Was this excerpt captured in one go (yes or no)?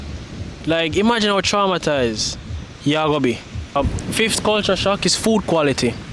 no